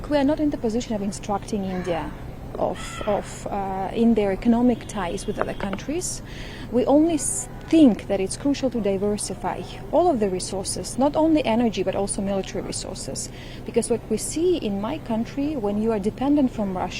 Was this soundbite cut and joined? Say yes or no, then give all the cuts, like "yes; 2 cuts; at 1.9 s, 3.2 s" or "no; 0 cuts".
no; 0 cuts